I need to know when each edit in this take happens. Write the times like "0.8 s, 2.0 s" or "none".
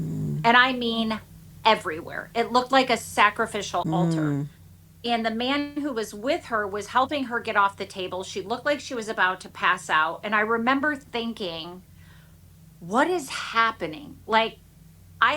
3.8 s